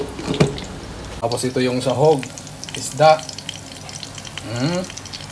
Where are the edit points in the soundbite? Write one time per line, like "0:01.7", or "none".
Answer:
0:01.2